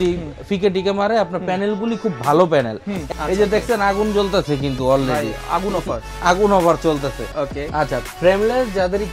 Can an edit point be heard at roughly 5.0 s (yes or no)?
no